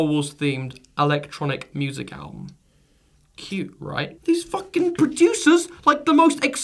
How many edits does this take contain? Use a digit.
0